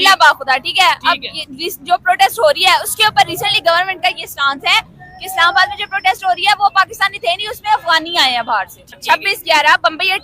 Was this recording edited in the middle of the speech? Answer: yes; 1 cut; at 8.9 s

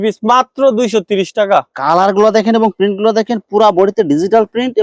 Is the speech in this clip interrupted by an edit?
no; 0 cuts

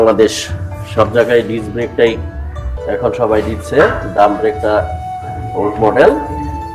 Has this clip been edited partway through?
no; 0 cuts

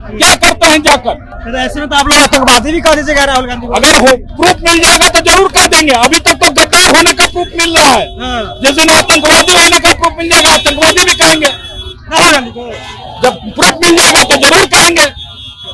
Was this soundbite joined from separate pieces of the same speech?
no; 0 cuts

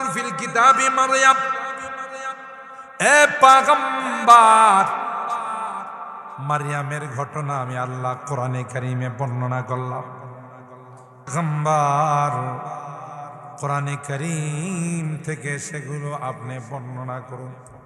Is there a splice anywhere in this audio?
yes; 1 cut; at 11.3 s

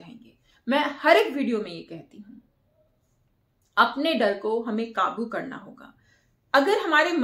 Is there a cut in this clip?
no; 0 cuts

